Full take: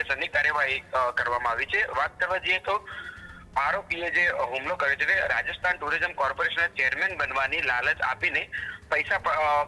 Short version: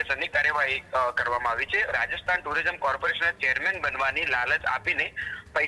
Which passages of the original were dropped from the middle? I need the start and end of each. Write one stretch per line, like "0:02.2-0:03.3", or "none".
0:01.9-0:05.3